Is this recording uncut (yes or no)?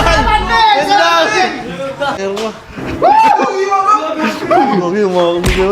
no